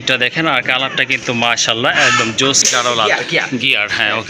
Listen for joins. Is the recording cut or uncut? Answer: cut